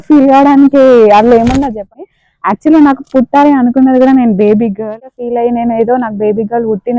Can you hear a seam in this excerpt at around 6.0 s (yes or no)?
no